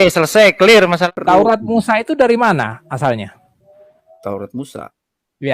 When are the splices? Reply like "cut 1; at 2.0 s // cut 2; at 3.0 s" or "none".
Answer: cut 1; at 1.1 s